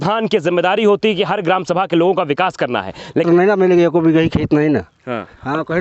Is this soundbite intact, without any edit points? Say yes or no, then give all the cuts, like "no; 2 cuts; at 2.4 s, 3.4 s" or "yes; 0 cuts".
no; 1 cut; at 3.2 s